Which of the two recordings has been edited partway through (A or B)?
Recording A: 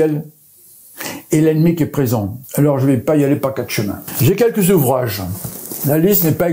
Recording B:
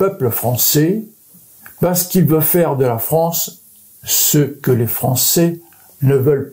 A